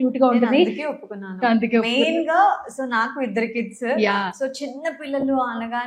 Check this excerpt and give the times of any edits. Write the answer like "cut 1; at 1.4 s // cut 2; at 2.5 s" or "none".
none